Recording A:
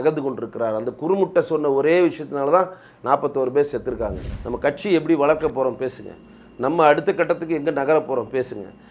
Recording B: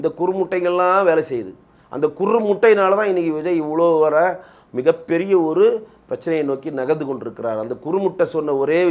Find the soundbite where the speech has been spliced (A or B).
A